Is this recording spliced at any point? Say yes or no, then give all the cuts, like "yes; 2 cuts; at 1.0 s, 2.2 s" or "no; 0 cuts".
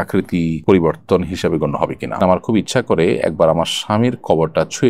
yes; 1 cut; at 2.2 s